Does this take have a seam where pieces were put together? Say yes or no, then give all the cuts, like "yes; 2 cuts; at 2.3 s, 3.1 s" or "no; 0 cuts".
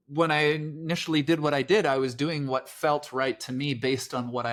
no; 0 cuts